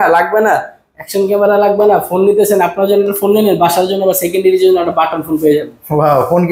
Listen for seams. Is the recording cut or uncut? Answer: uncut